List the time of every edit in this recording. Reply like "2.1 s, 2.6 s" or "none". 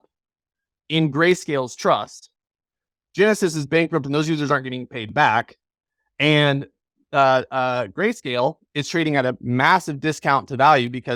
none

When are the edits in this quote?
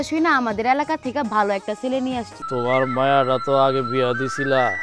2.4 s

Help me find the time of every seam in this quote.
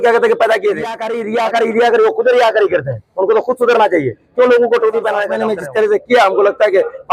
1.2 s, 5.4 s

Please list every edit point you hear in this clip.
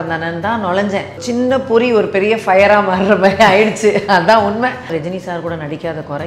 1.2 s, 4.9 s

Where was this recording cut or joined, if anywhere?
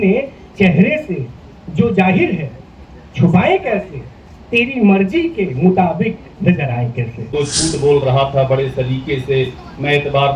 7.2 s

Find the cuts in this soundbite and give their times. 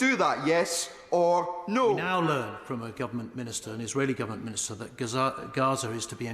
2.1 s

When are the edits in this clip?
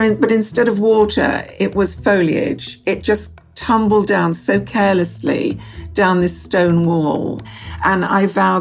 7.5 s

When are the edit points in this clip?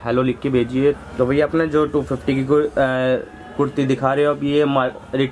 1.0 s

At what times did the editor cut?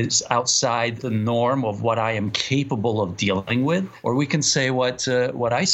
1.0 s, 3.6 s

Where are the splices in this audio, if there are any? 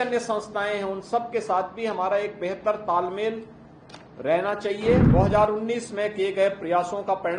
5.1 s

